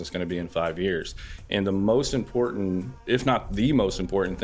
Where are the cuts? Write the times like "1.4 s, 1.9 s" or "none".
2.9 s